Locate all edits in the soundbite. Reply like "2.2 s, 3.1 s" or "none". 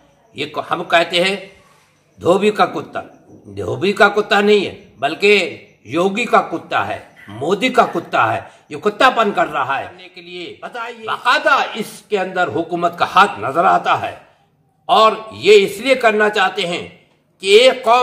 10.5 s